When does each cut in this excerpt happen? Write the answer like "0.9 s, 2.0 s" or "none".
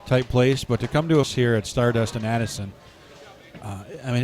1.3 s